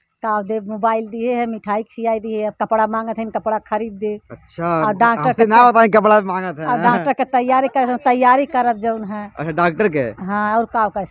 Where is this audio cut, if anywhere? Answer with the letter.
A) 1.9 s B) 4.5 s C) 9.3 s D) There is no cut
D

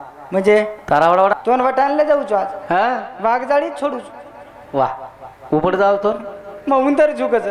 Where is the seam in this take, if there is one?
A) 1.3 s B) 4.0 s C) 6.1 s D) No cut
A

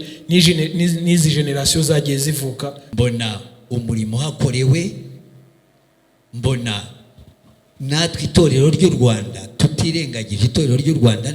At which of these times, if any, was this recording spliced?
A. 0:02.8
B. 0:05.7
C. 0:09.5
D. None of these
A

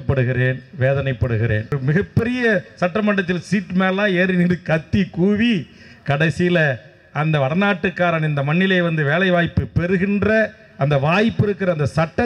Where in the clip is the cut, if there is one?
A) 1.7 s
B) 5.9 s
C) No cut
A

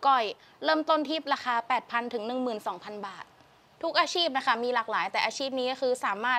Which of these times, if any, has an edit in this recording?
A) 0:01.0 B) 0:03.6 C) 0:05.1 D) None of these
B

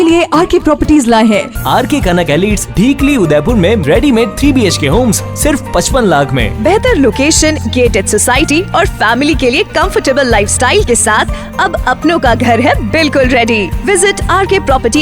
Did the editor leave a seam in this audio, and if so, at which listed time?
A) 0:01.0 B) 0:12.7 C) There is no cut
C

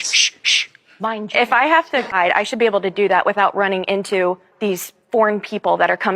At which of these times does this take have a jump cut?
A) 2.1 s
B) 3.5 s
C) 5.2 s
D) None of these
A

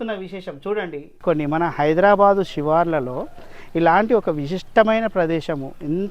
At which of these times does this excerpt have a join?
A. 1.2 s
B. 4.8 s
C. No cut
A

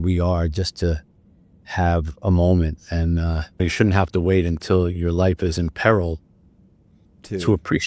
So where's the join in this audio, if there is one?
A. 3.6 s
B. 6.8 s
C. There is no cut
A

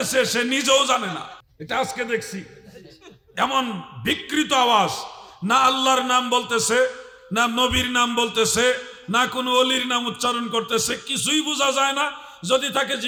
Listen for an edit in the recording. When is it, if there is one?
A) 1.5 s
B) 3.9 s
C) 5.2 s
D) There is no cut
D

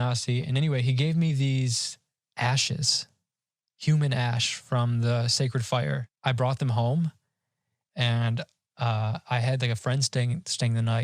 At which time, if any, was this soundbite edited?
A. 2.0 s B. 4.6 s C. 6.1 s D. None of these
C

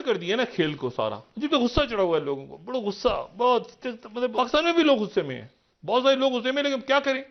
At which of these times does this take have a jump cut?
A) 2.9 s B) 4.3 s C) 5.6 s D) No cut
B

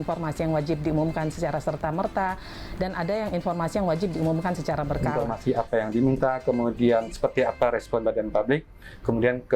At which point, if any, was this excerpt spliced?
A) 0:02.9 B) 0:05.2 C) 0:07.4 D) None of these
B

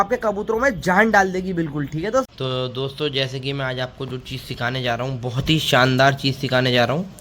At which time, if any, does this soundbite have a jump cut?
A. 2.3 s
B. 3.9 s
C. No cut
A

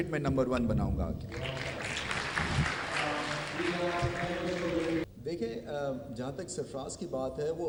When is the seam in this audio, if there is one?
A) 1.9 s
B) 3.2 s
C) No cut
C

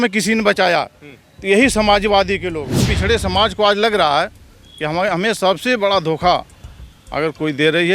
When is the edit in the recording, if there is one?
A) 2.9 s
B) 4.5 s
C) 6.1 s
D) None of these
A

